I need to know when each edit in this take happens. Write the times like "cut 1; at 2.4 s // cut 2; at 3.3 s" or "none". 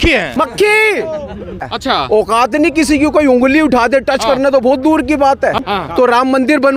cut 1; at 1.7 s // cut 2; at 5.6 s